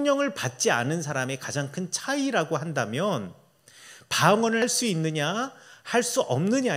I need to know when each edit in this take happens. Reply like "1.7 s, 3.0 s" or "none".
4.6 s